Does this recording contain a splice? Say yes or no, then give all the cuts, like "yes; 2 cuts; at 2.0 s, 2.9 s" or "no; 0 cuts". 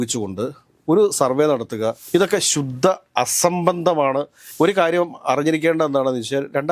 yes; 2 cuts; at 2.0 s, 4.4 s